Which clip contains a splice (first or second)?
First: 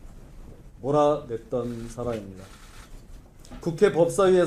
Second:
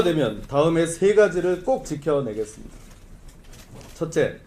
first